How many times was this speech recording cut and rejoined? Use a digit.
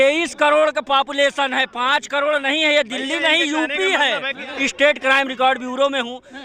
1